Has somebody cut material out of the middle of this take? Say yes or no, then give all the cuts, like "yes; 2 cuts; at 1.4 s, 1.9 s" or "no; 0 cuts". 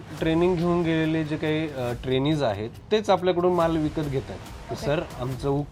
yes; 1 cut; at 2.8 s